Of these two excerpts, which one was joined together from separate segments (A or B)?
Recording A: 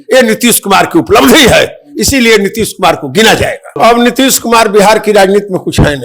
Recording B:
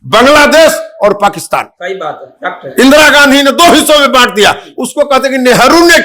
A